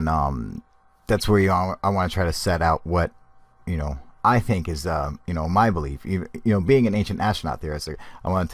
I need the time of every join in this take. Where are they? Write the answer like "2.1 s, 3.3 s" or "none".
5.1 s